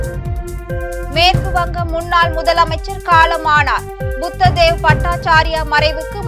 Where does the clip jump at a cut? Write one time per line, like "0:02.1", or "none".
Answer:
0:01.0